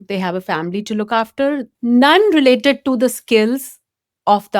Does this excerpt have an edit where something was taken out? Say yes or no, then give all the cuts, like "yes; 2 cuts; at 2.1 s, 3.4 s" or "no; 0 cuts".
yes; 1 cut; at 1.7 s